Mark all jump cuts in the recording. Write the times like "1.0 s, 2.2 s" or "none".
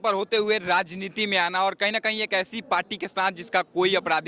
none